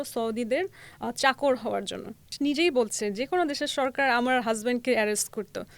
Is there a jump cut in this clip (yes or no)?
yes